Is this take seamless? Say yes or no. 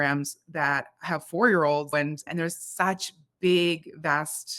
no